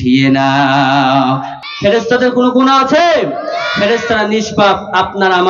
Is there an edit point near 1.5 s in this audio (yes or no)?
yes